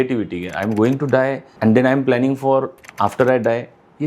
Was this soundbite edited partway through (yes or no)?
yes